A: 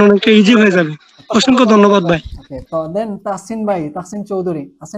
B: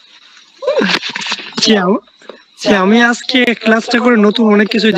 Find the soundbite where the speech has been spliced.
A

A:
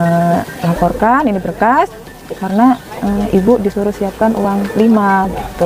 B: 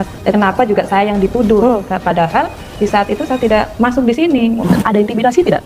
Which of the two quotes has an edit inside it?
B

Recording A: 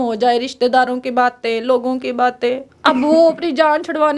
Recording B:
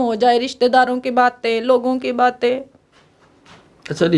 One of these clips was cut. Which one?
A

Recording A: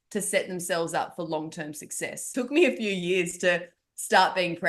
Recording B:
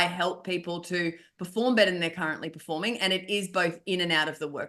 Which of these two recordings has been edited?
A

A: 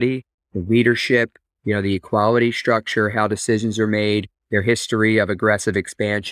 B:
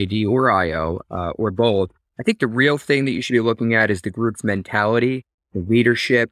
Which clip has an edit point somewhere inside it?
B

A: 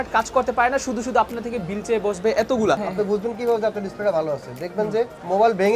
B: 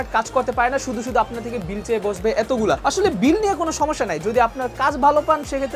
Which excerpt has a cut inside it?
A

